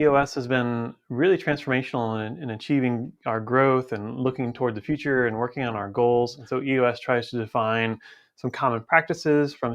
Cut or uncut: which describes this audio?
cut